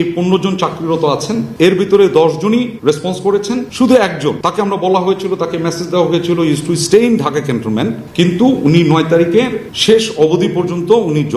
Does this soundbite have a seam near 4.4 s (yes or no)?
yes